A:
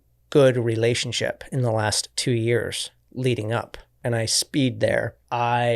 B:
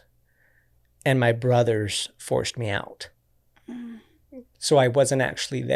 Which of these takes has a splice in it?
A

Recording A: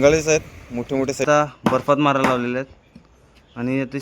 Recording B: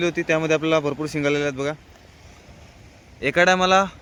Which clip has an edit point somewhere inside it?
A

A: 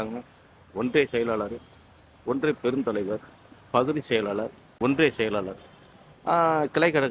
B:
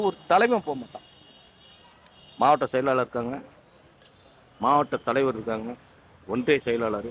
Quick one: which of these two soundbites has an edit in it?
A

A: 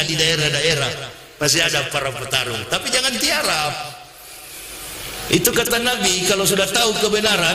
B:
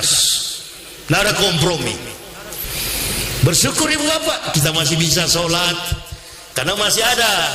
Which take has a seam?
B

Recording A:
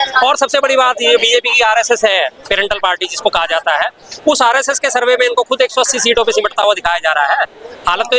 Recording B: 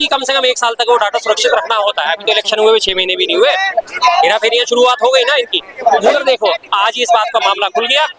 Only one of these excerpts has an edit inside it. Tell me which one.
B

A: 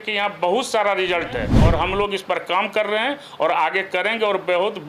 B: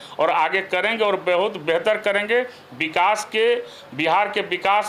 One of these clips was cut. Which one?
A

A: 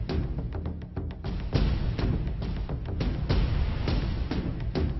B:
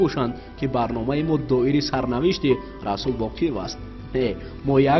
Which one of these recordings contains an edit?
A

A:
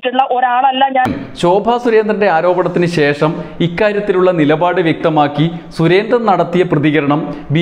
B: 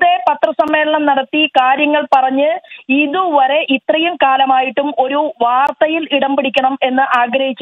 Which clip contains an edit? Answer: A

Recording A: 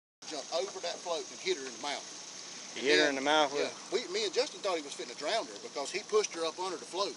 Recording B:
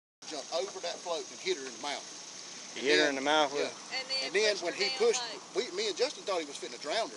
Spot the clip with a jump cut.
A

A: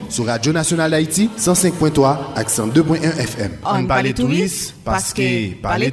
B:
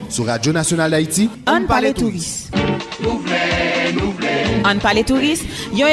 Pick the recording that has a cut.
A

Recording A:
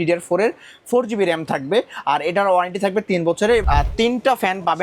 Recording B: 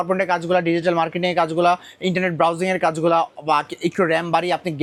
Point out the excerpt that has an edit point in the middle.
A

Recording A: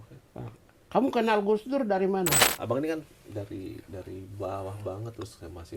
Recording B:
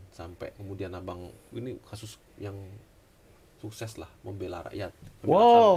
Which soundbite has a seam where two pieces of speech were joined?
A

